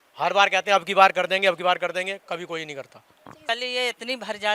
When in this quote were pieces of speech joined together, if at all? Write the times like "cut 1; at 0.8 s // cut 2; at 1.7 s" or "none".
cut 1; at 3.4 s